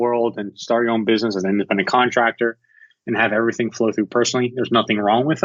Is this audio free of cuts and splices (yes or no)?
yes